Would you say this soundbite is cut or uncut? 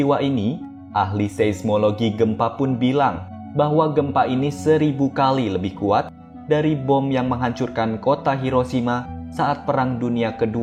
uncut